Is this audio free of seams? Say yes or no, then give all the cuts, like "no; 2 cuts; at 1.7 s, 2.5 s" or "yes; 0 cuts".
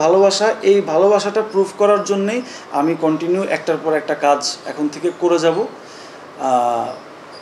yes; 0 cuts